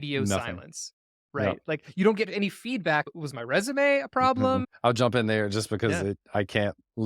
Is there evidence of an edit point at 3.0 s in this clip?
yes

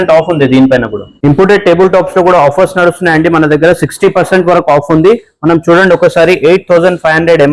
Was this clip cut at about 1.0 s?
yes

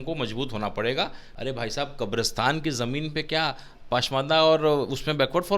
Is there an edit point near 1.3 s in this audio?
yes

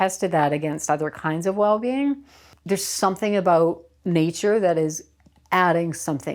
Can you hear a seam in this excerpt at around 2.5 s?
yes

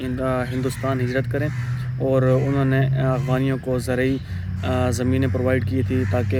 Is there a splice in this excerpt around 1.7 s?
no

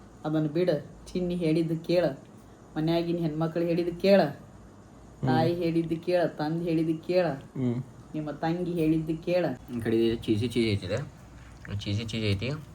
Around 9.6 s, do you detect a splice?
yes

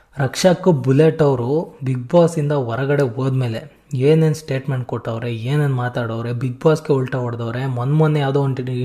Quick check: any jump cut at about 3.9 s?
no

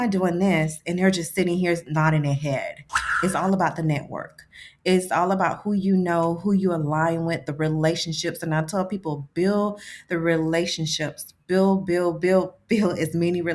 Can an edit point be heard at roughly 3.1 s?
yes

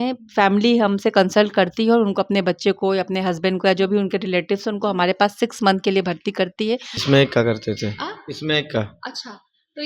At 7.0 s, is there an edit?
yes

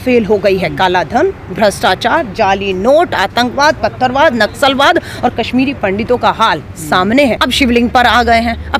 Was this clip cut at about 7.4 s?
yes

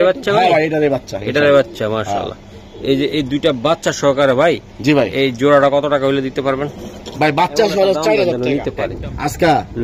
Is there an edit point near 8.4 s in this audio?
yes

